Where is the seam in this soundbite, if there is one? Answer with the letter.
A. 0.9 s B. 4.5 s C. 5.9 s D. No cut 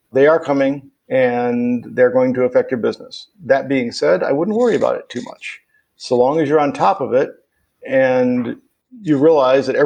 A